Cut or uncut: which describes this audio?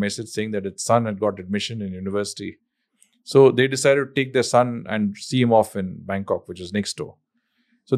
uncut